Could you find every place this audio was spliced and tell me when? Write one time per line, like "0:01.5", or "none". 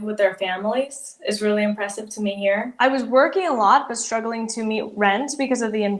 0:02.7